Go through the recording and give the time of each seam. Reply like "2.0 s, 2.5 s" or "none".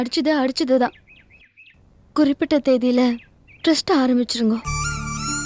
none